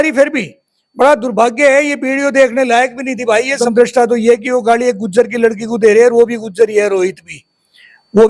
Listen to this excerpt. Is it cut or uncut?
cut